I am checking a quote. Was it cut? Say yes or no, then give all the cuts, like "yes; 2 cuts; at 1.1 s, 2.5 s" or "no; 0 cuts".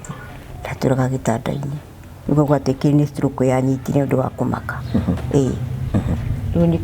yes; 1 cut; at 2.2 s